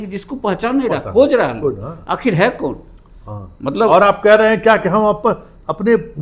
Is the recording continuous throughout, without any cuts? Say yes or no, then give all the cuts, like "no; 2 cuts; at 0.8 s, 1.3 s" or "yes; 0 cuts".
yes; 0 cuts